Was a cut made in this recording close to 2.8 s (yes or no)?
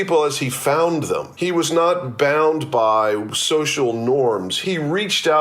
no